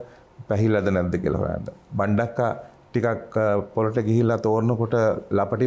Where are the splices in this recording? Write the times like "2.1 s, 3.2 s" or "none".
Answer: none